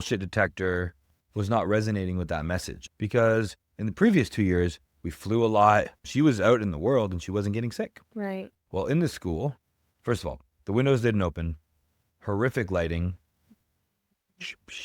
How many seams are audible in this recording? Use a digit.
2